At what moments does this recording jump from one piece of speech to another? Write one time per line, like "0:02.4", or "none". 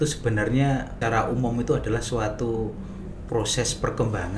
0:00.9